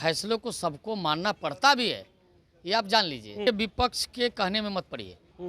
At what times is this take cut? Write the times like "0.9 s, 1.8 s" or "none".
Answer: 3.4 s

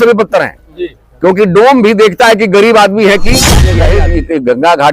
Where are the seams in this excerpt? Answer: 3.7 s

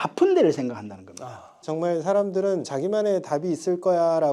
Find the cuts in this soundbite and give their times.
1.5 s, 2.7 s

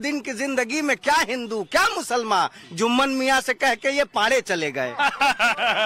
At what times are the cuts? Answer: 4.4 s

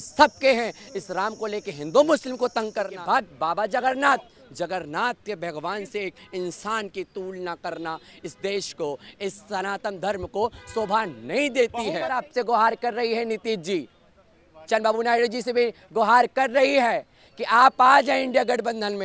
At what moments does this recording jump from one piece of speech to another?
2.9 s, 12.3 s

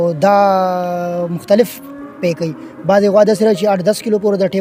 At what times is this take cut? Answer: none

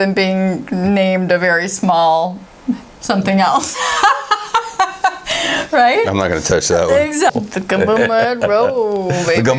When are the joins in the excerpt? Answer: 7.3 s

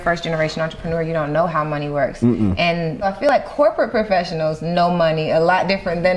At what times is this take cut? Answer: 3.3 s

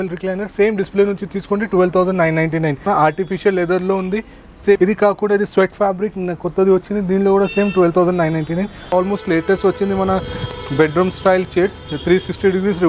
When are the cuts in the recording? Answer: 2.8 s, 4.8 s, 8.9 s

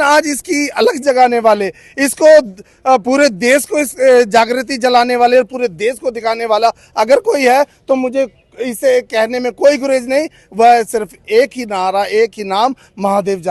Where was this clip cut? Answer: none

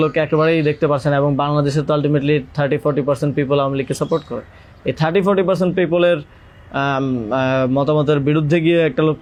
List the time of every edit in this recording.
none

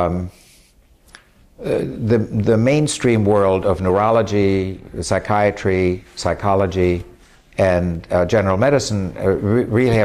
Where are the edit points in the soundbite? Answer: none

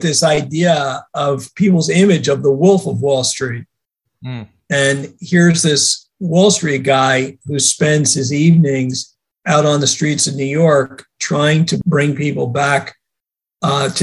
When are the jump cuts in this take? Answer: 11.8 s

